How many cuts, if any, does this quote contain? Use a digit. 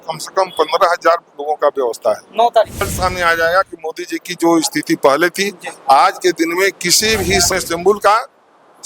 2